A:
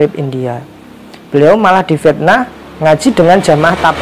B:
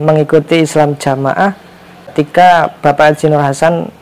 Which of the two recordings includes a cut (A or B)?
B